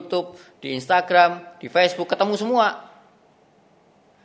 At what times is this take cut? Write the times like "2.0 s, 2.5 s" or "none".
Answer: none